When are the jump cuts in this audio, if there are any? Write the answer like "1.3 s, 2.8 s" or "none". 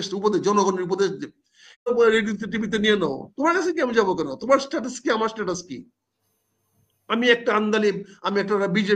1.9 s